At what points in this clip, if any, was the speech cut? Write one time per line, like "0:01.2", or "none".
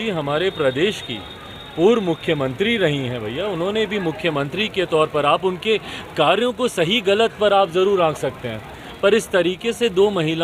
none